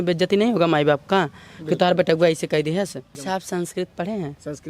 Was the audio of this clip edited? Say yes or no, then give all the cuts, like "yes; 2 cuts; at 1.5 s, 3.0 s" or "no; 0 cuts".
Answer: yes; 1 cut; at 3.2 s